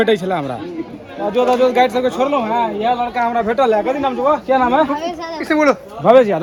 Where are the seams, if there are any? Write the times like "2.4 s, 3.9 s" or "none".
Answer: none